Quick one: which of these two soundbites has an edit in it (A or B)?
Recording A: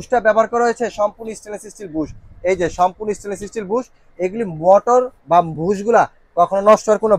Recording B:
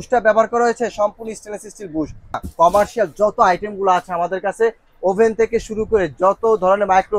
B